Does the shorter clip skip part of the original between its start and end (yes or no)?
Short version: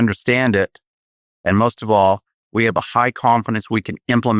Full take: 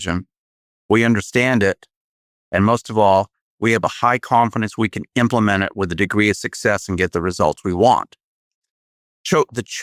no